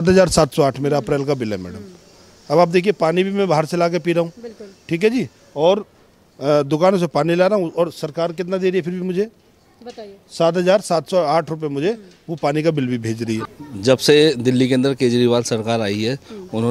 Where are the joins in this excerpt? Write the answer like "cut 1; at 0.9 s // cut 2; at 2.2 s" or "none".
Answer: cut 1; at 13.4 s